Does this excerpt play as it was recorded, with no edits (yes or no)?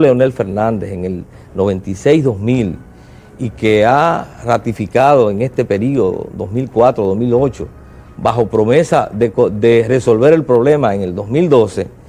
yes